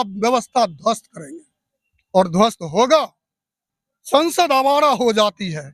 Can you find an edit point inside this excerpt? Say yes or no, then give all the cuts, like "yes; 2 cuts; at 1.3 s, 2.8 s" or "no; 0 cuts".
yes; 1 cut; at 3.6 s